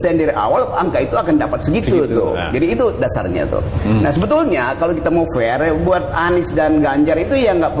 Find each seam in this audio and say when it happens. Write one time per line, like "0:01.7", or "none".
none